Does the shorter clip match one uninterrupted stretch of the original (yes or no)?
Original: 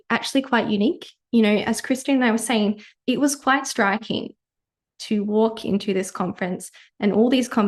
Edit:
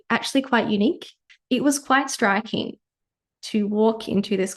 no